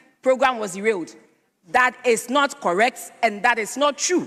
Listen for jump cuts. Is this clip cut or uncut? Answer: uncut